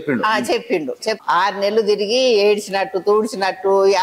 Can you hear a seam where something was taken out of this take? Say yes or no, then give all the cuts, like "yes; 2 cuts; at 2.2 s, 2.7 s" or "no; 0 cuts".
yes; 1 cut; at 1.2 s